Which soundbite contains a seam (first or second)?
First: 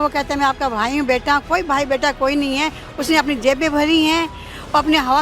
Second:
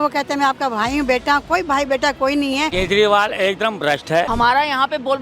second